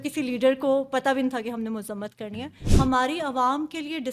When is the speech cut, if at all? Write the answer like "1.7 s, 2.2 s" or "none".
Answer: 2.6 s